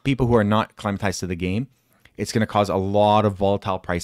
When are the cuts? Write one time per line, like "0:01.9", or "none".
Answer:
none